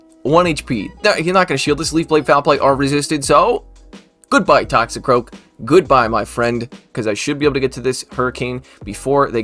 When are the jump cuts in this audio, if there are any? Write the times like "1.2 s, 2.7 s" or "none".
6.9 s